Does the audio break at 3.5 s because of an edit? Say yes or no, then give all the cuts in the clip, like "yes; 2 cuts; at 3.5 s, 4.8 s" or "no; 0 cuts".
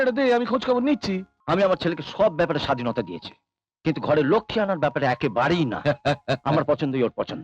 no; 1 cut; at 1.3 s